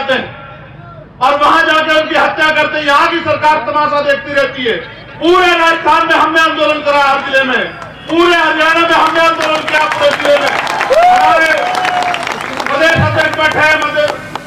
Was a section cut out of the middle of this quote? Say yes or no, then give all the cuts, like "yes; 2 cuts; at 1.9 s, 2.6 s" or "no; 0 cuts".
no; 0 cuts